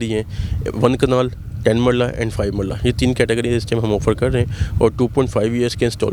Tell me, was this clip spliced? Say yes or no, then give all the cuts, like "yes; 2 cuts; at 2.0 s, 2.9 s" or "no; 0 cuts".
no; 0 cuts